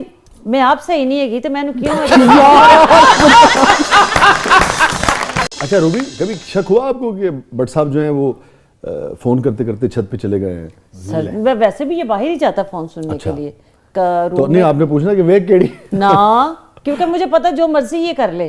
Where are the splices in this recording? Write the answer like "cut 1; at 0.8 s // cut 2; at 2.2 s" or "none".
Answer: cut 1; at 5.5 s